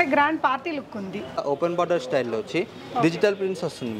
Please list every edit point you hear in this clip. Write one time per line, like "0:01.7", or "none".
0:01.4